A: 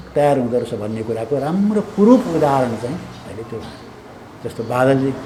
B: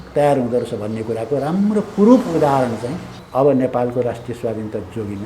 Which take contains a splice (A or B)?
B